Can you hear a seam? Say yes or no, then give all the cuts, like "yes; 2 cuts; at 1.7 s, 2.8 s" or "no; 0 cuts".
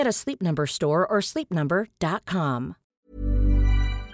yes; 1 cut; at 2.8 s